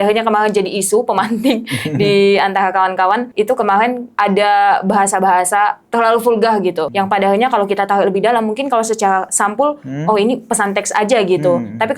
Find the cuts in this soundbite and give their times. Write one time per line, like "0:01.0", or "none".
0:03.7
0:05.8
0:06.9

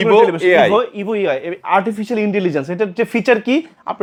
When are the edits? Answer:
none

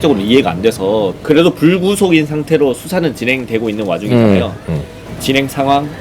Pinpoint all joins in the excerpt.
0:01.1

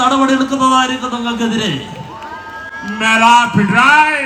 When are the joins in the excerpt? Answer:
none

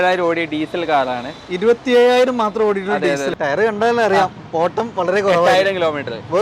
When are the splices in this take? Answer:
0:03.3

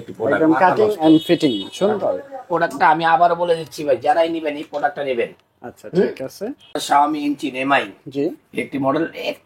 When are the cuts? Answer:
0:02.3
0:06.8

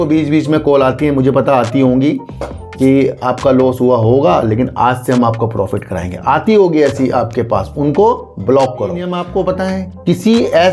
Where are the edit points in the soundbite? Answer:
0:09.2

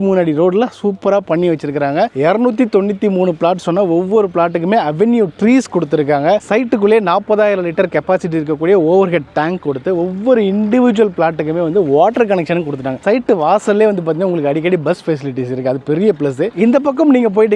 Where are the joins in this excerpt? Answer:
0:02.1
0:12.9
0:16.5

